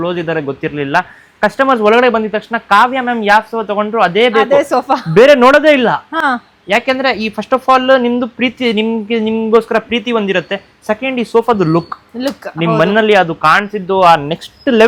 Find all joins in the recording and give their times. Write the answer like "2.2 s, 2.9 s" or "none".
none